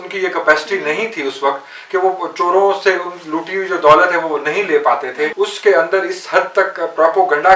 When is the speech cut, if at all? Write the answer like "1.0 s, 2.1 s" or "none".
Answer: 5.3 s